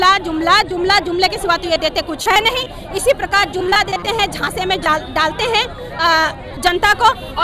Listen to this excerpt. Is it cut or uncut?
uncut